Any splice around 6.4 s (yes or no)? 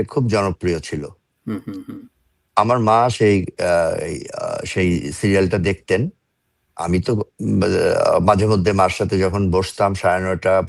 no